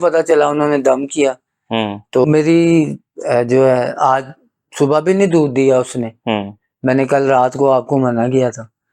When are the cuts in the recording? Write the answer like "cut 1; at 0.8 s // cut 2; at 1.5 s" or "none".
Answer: cut 1; at 2.2 s